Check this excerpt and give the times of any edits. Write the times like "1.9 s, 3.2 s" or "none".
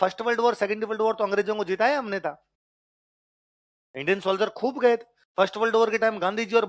none